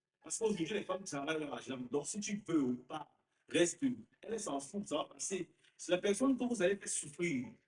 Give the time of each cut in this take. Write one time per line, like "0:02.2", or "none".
0:04.3